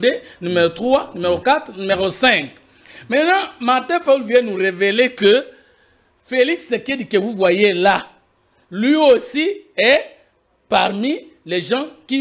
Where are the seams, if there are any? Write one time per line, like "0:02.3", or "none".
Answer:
none